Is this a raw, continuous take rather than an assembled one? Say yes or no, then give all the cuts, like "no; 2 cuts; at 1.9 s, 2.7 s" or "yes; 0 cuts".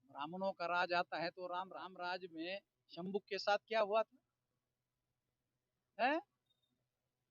no; 1 cut; at 1.9 s